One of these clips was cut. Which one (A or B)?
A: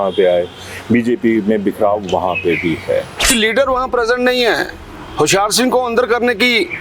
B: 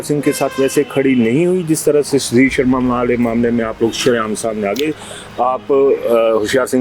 A